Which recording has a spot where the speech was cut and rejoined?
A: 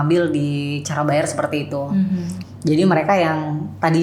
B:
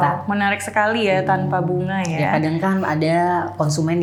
A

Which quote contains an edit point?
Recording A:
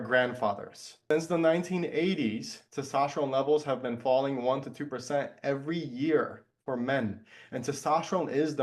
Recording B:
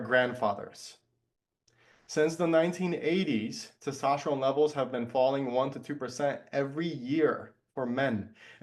A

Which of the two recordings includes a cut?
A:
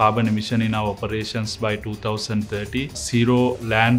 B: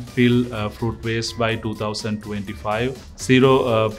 A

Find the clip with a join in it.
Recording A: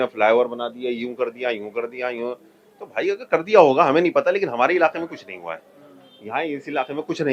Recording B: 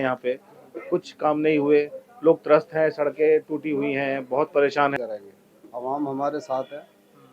B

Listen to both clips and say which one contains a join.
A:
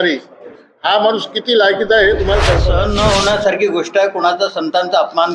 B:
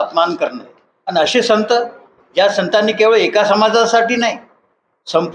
A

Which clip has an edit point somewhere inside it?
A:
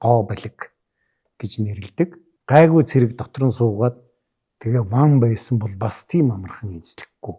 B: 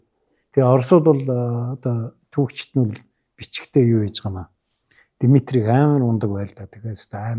A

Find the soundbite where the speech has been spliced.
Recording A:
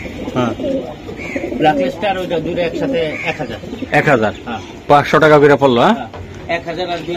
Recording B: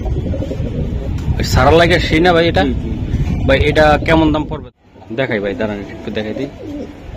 B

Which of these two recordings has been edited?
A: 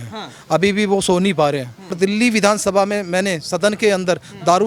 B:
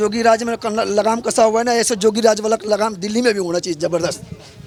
A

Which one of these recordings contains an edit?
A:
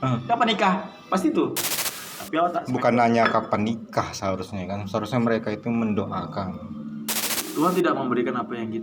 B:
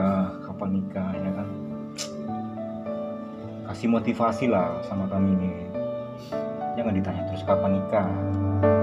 A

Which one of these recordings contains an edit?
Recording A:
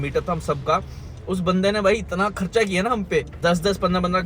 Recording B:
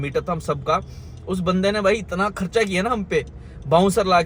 A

